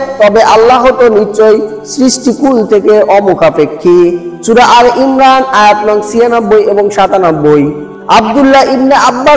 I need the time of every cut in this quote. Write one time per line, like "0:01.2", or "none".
0:07.9